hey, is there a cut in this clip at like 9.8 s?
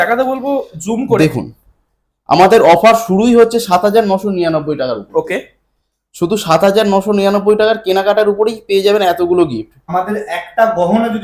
yes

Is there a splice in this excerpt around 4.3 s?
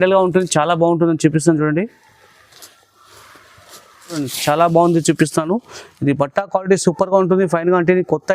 yes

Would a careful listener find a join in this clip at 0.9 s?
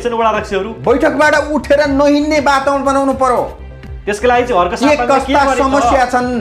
no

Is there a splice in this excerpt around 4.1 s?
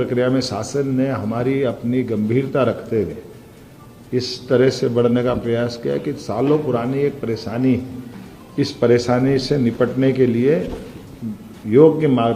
no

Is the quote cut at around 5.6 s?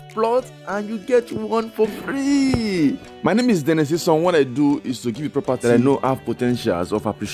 yes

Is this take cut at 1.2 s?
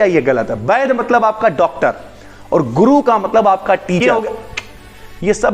no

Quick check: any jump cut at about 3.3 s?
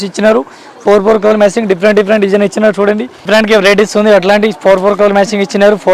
yes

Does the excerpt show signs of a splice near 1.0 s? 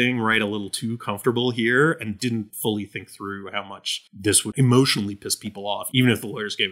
no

